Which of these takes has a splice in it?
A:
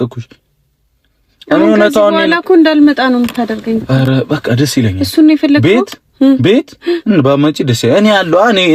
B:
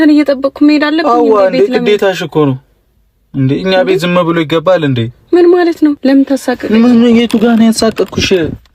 B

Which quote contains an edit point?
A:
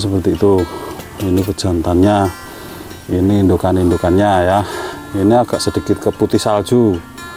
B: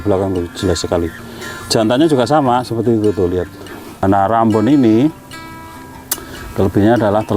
B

